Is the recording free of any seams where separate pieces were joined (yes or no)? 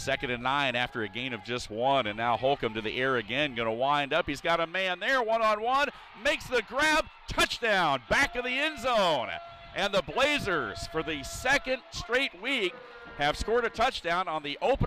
yes